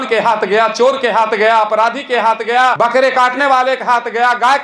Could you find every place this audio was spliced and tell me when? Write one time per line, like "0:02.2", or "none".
0:02.8